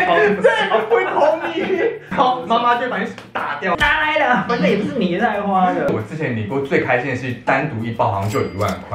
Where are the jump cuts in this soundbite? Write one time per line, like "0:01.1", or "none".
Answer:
0:02.1
0:03.7
0:05.9